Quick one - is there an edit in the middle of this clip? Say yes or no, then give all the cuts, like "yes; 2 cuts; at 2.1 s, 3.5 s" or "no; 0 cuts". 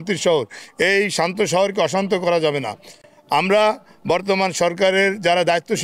no; 0 cuts